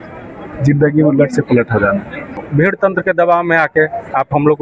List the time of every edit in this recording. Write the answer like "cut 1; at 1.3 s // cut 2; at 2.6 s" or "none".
cut 1; at 2.4 s